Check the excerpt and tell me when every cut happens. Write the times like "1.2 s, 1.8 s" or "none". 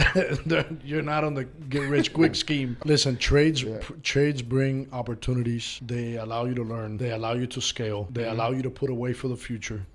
2.7 s, 5.8 s, 6.9 s, 8.1 s